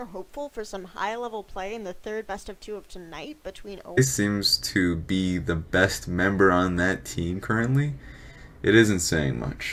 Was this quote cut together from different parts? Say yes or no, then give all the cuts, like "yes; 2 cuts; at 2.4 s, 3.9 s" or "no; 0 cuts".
no; 0 cuts